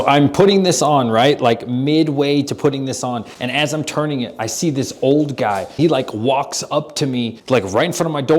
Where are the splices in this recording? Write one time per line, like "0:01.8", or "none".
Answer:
0:03.3
0:05.7
0:07.4